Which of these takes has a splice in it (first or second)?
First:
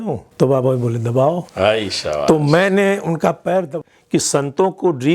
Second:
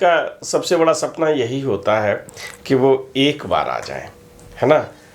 first